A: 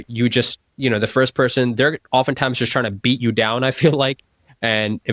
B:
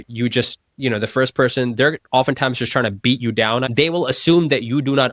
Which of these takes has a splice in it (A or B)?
B